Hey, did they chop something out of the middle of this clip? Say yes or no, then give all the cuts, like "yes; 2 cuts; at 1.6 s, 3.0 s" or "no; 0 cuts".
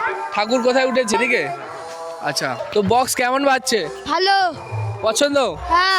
yes; 2 cuts; at 1.1 s, 2.6 s